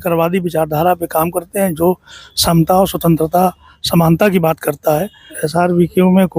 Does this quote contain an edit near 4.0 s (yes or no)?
no